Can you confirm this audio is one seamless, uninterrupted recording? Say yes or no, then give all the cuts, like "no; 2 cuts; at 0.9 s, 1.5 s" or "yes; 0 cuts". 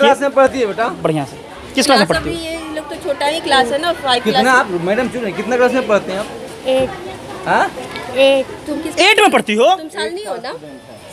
yes; 0 cuts